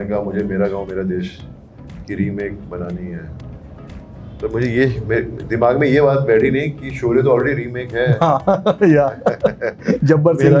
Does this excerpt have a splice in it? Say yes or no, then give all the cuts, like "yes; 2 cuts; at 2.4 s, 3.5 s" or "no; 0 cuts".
no; 0 cuts